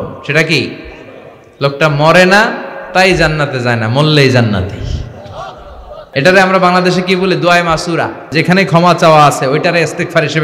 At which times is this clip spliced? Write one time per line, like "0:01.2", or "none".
0:06.0
0:08.3